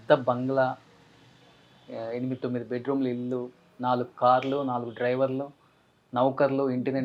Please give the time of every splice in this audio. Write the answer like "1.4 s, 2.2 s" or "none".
none